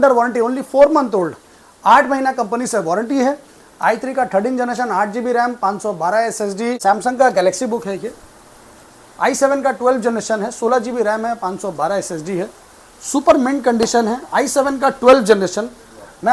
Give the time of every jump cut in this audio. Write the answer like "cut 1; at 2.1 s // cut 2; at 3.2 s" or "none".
cut 1; at 6.8 s